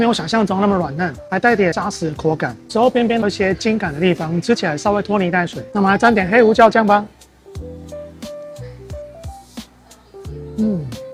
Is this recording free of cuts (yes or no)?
yes